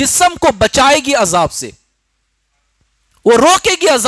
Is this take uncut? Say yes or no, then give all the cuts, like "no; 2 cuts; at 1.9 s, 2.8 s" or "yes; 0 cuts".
yes; 0 cuts